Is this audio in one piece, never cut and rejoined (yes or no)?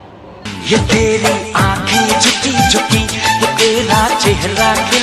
yes